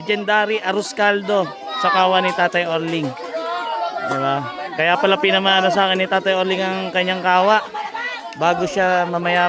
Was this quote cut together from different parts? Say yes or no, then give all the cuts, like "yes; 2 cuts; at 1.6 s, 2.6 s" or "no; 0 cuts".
no; 0 cuts